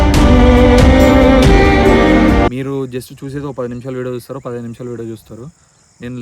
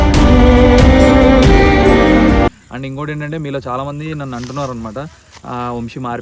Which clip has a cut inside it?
first; 1 cut; at 2.5 s

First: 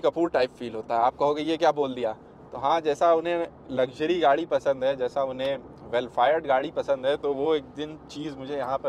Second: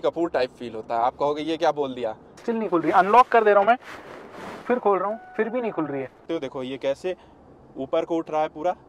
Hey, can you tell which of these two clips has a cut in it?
second; 2 cuts; at 2.4 s, 6.2 s

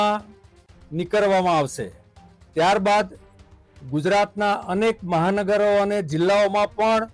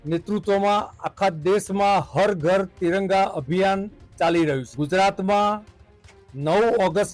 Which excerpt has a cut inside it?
second; 1 cut; at 4.7 s

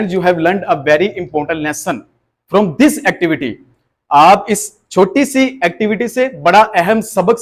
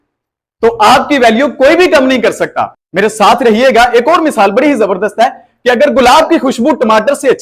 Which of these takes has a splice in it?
second; 1 cut; at 2.8 s

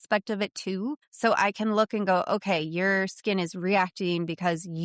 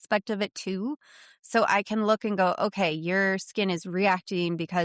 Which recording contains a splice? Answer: first; 1 cut; at 1.1 s

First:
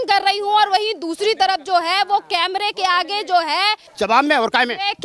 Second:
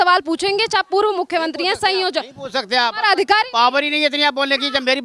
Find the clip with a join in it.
first; 1 cut; at 3.8 s

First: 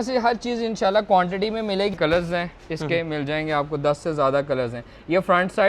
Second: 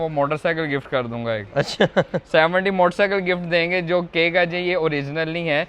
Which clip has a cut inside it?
first; 1 cut; at 2.0 s

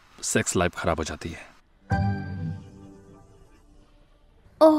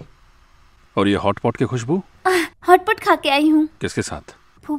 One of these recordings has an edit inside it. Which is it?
second; 1 cut; at 3.7 s

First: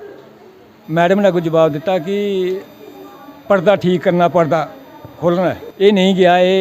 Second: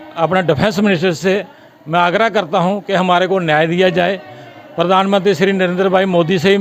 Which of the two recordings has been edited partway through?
first; 1 cut; at 5.7 s

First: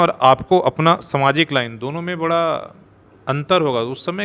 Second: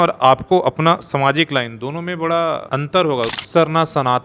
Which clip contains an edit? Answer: second; 1 cut; at 3.2 s

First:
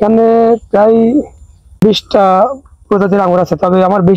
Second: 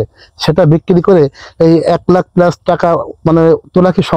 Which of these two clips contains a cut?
first; 1 cut; at 1.8 s

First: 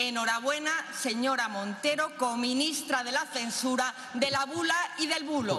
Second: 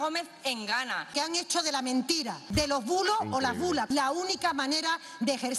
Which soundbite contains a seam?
second; 3 cuts; at 1.1 s, 2.4 s, 3.9 s

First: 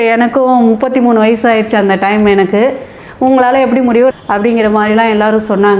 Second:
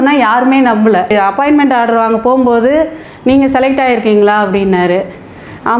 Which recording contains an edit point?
second; 1 cut; at 1.1 s

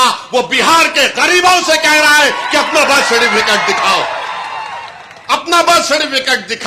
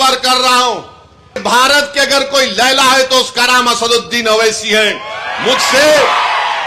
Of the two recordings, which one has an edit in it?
second; 1 cut; at 1.4 s

